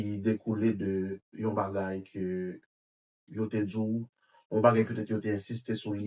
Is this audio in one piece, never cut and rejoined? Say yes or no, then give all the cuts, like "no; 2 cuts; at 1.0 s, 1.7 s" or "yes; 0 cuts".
yes; 0 cuts